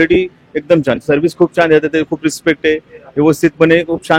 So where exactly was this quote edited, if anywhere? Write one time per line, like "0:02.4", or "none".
none